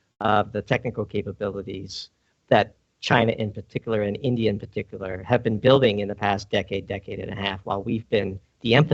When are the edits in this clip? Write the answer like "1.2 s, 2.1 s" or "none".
none